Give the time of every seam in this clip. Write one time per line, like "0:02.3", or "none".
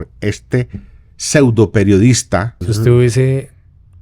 0:02.6